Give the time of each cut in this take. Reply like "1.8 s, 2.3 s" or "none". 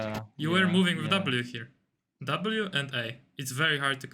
2.1 s